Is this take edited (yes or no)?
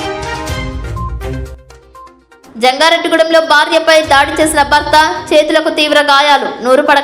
no